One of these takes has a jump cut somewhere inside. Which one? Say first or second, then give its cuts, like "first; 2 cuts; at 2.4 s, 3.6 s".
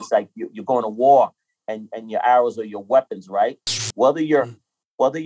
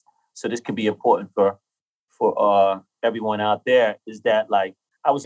first; 1 cut; at 3.8 s